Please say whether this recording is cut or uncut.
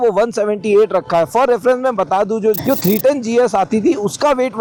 uncut